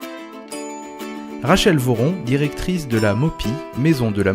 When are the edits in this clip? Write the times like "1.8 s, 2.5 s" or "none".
1.4 s